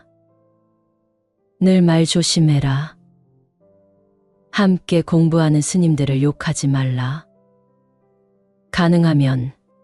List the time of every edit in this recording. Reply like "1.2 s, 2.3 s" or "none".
2.9 s, 4.5 s